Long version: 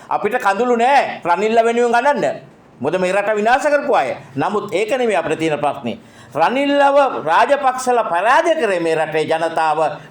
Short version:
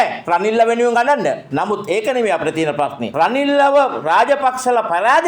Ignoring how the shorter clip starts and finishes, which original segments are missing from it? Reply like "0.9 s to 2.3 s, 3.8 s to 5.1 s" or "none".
2.4 s to 4.3 s, 5.9 s to 6.2 s